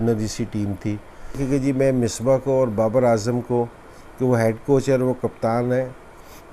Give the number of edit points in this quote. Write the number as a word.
one